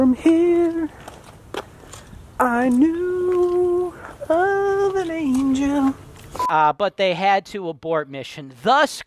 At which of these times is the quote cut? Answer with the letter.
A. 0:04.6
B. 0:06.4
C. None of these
B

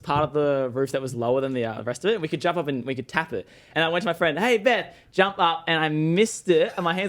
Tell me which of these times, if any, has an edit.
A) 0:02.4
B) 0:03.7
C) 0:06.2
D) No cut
B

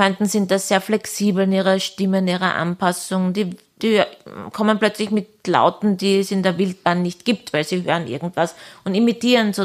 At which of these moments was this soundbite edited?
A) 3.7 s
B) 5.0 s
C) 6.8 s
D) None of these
D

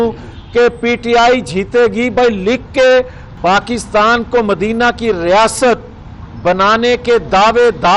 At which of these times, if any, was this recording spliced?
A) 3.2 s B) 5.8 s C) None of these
A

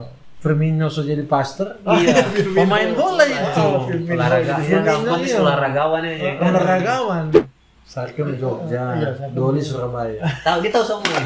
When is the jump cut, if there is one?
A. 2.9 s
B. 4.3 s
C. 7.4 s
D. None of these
C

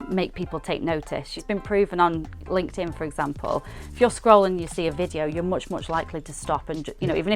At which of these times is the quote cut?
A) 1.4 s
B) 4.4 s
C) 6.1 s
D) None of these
A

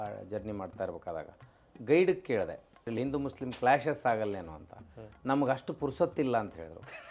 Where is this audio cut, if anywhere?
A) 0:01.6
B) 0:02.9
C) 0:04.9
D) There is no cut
B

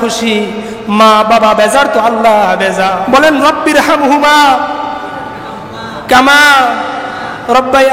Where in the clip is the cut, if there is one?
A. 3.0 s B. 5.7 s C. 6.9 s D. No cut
A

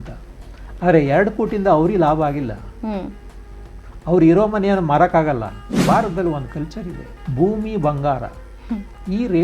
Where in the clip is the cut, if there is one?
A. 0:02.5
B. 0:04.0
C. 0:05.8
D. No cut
C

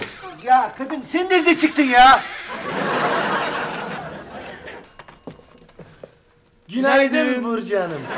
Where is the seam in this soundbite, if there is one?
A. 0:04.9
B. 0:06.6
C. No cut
A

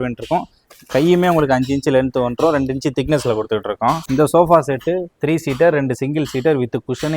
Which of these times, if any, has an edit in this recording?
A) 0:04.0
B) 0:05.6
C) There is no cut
A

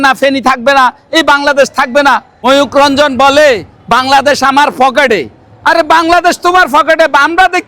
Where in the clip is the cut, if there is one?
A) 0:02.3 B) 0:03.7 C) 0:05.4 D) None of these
A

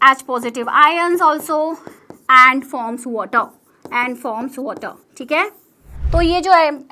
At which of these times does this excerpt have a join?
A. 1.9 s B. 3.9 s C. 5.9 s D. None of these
C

